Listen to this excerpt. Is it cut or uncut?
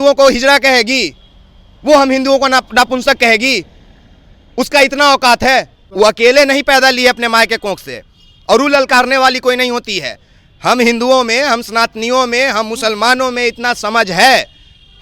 cut